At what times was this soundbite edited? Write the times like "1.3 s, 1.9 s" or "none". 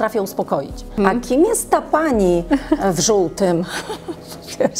1.0 s